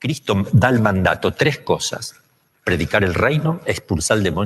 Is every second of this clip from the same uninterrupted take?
yes; 0 cuts

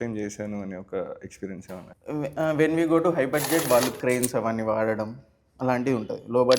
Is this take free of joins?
no; 1 cut; at 1.9 s

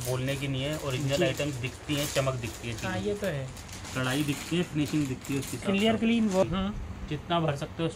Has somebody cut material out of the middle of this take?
yes; 1 cut; at 6.4 s

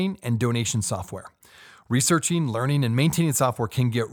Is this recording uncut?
yes; 0 cuts

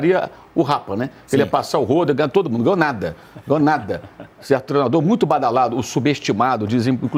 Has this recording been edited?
no; 0 cuts

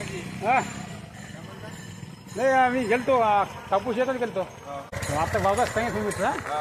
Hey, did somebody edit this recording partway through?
yes; 1 cut; at 5.0 s

